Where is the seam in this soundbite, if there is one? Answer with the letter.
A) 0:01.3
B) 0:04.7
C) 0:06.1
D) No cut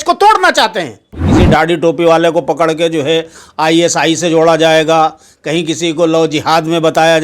A